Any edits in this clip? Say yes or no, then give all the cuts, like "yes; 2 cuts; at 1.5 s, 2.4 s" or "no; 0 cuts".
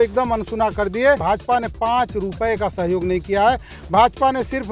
yes; 1 cut; at 1.2 s